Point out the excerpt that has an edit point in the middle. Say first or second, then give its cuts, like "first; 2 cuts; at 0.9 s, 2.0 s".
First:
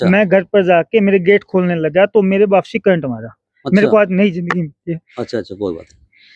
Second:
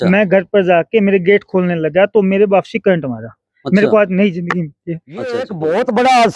second; 1 cut; at 5.4 s